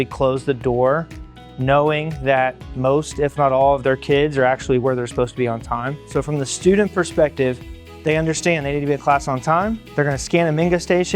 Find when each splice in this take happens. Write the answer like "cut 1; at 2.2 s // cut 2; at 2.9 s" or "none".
cut 1; at 6.0 s // cut 2; at 9.8 s